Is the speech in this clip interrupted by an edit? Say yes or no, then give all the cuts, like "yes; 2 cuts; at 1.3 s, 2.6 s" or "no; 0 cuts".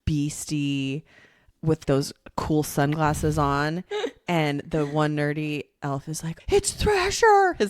yes; 1 cut; at 6.3 s